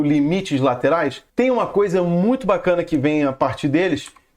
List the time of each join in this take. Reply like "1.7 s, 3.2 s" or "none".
1.2 s